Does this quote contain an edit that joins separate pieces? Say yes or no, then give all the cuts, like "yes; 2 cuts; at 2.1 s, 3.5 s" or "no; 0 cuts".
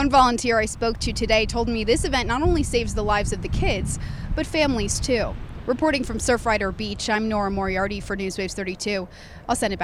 no; 0 cuts